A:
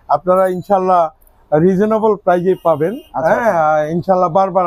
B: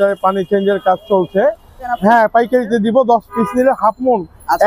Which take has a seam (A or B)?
B